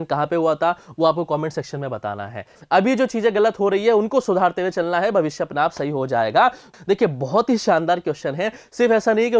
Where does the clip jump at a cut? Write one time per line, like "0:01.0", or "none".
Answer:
0:02.5
0:06.7